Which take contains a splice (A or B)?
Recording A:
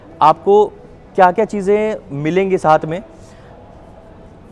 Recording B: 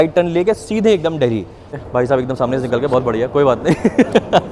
B